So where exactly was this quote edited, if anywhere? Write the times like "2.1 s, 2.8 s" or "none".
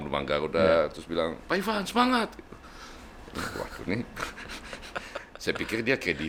none